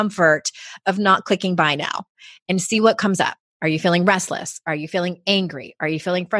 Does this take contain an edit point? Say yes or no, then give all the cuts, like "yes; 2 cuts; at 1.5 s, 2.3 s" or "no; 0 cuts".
yes; 1 cut; at 3.4 s